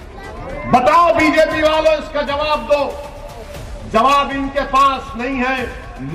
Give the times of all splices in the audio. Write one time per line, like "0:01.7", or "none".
none